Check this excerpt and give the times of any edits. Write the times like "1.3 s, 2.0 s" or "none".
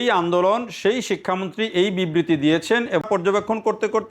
3.0 s